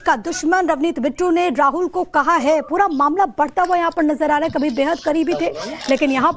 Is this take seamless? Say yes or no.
yes